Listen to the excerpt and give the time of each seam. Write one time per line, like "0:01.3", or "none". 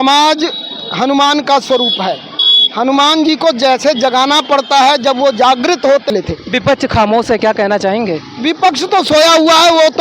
0:06.1